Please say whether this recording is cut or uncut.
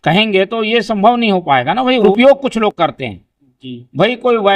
cut